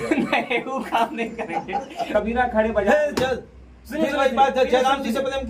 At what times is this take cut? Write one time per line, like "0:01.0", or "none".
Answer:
0:02.1